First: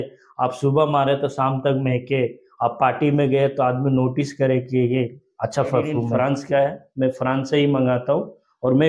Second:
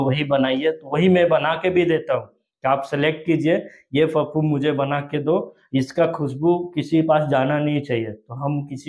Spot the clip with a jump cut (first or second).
first